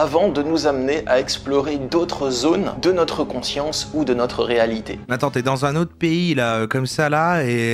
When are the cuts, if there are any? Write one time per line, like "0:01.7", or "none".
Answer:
0:02.7
0:05.1